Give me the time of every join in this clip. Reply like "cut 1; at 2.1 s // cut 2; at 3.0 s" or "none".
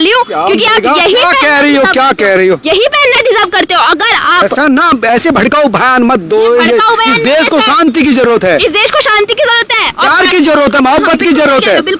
none